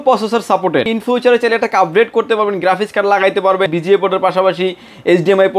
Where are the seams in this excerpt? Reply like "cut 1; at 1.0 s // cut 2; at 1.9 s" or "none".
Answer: cut 1; at 0.9 s // cut 2; at 3.7 s